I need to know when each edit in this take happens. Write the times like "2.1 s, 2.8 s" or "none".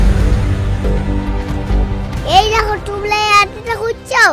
2.1 s